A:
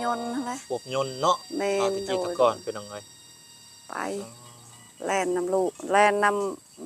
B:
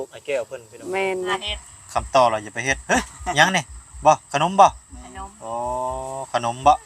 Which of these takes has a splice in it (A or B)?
B